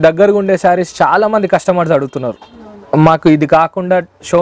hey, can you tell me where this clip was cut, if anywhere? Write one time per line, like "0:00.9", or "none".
none